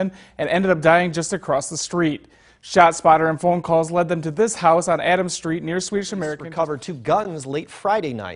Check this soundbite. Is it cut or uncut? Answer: cut